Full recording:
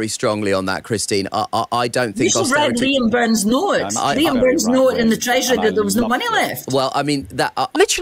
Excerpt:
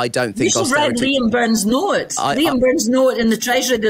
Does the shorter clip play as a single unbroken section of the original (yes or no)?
yes